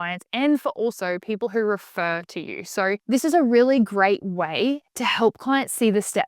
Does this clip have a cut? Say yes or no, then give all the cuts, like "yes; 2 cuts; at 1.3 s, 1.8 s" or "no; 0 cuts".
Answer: yes; 1 cut; at 3.0 s